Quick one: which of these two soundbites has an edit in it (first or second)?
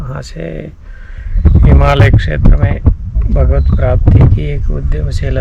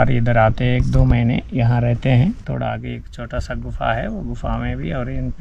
second